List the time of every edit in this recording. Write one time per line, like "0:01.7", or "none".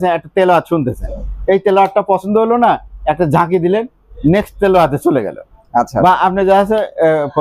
none